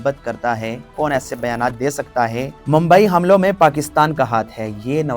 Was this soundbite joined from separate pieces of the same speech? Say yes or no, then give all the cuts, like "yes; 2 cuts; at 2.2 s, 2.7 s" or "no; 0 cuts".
yes; 2 cuts; at 0.9 s, 2.5 s